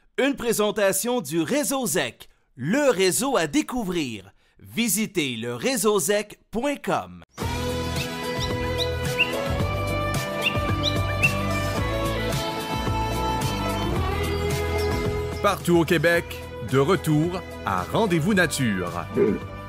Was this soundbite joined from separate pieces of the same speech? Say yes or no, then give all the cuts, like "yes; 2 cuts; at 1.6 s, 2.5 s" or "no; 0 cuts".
no; 0 cuts